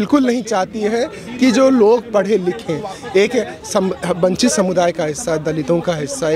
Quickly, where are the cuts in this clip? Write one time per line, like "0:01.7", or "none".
none